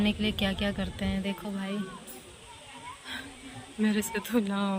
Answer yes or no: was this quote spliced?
no